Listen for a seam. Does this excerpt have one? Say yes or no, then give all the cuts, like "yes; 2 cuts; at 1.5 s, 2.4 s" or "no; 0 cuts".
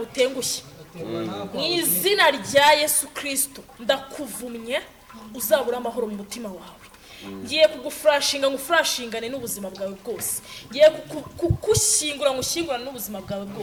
no; 0 cuts